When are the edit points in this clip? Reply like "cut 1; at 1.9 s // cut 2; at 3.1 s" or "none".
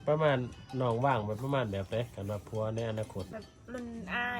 cut 1; at 3.3 s